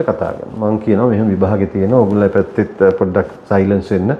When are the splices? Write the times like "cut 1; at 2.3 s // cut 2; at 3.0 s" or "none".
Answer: none